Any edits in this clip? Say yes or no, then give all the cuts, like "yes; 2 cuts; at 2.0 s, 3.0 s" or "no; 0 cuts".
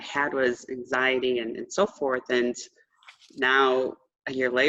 no; 0 cuts